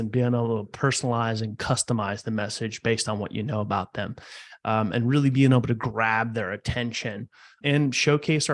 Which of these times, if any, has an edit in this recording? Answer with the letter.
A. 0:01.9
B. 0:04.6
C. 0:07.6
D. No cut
C